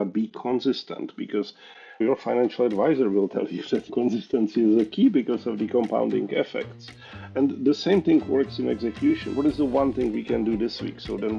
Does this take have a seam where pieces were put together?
yes; 3 cuts; at 2.0 s, 3.9 s, 9.3 s

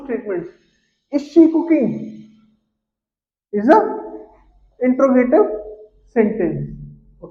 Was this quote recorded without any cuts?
yes; 0 cuts

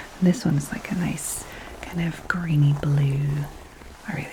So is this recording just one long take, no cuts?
yes; 0 cuts

